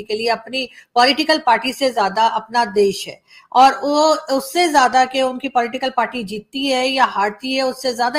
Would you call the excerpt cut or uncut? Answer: uncut